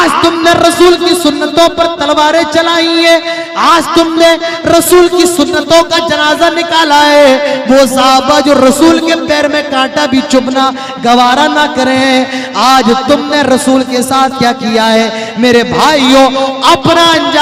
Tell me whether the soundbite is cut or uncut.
uncut